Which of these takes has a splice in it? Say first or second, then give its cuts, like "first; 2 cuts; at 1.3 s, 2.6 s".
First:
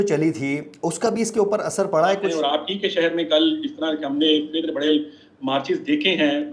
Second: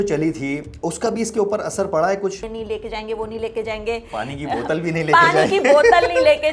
second; 1 cut; at 2.4 s